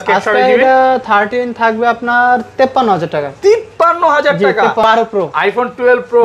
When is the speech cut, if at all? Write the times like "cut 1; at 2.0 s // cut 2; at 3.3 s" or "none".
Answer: cut 1; at 4.8 s